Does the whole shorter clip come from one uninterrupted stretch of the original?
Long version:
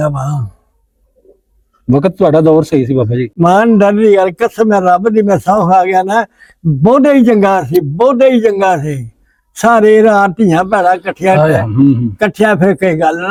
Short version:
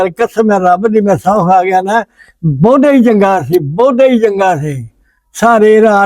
yes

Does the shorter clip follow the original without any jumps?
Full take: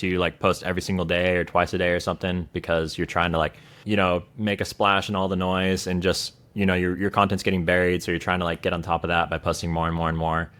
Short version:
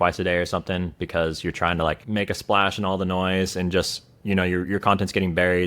no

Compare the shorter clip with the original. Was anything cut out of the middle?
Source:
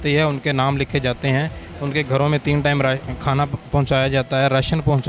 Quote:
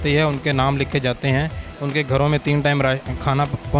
no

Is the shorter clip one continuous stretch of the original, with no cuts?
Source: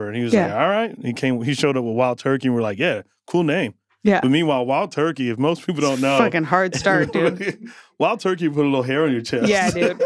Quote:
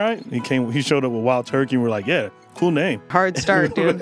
no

